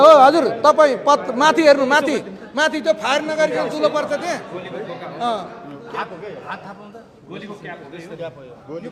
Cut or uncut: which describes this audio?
uncut